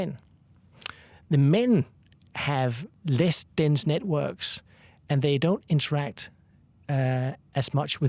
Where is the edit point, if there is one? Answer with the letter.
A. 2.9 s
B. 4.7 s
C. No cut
A